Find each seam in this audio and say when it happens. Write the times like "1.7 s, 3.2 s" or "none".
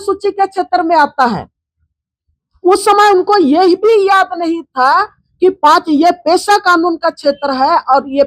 none

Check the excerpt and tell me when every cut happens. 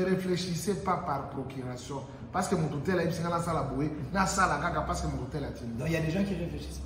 none

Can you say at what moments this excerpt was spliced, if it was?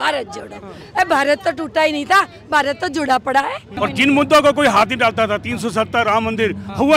3.6 s

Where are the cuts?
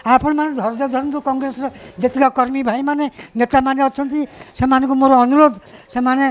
none

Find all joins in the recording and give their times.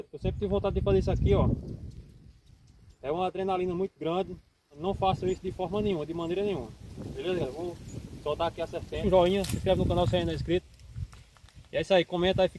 4.8 s, 9.0 s

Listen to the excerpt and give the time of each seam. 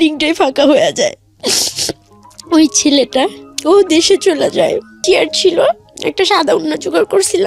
5.0 s

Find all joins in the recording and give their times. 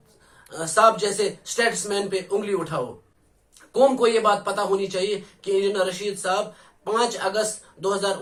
none

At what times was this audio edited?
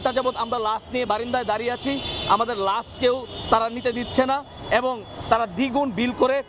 none

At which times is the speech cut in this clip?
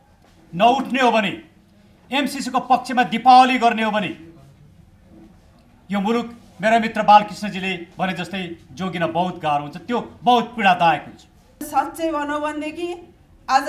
11.6 s

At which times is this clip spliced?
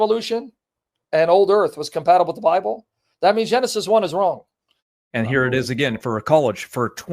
4.6 s

